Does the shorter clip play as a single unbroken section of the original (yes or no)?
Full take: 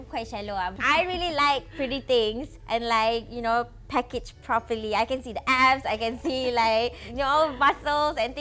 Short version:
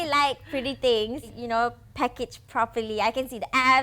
no